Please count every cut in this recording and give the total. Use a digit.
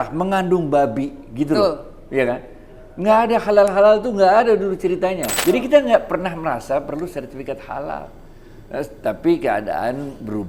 1